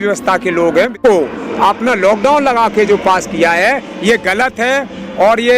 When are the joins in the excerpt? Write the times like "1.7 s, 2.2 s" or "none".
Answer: 1.0 s